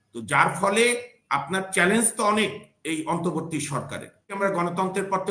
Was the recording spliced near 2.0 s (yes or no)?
no